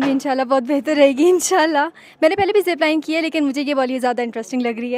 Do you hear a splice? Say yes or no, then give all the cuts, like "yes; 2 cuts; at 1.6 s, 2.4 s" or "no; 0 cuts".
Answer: no; 0 cuts